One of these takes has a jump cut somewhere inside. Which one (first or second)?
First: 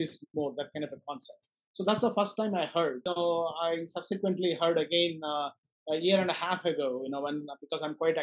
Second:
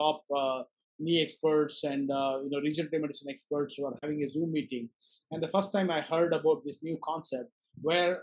first